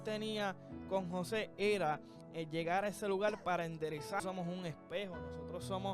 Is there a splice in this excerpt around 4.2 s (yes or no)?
yes